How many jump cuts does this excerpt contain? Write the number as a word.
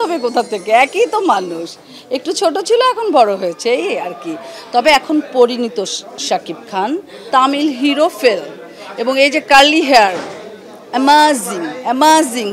one